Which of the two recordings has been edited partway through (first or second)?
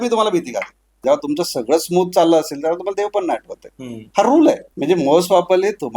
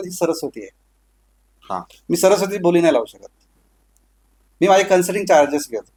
first